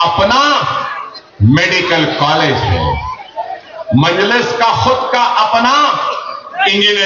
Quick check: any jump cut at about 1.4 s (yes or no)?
no